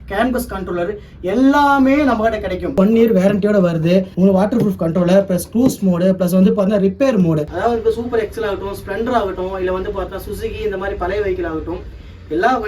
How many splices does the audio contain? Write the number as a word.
three